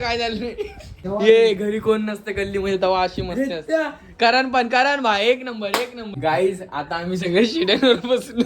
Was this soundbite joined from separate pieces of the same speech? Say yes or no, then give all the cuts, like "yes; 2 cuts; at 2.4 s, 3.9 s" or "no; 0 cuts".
yes; 2 cuts; at 1.0 s, 6.2 s